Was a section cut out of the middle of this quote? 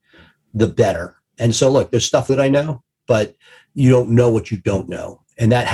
yes; 1 cut; at 2.3 s

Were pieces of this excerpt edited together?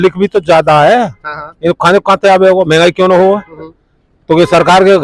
no; 0 cuts

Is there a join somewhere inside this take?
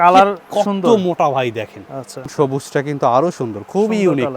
yes; 1 cut; at 2.2 s

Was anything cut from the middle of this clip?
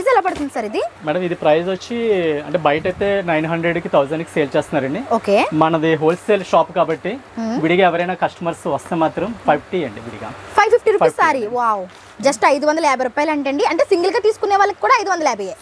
no; 0 cuts

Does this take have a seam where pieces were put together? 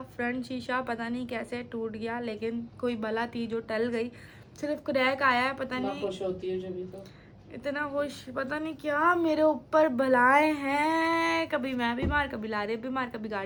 no; 0 cuts

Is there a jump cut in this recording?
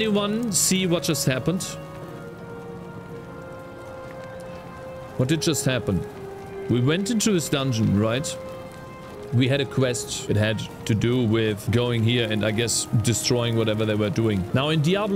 no; 0 cuts

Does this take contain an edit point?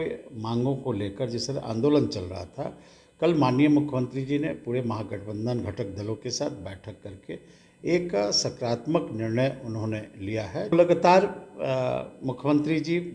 yes; 1 cut; at 10.7 s

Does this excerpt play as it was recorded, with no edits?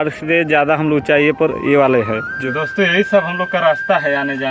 no; 1 cut; at 2.3 s

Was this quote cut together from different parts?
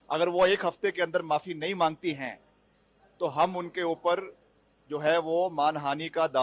no; 0 cuts

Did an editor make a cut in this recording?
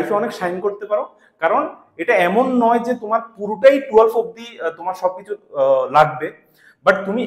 no; 0 cuts

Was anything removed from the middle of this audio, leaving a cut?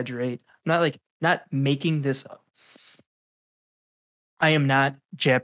no; 0 cuts

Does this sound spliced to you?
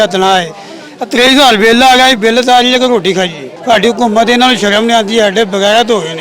yes; 1 cut; at 3.5 s

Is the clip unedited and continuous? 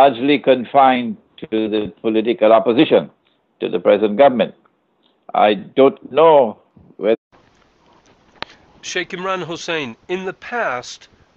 yes; 0 cuts

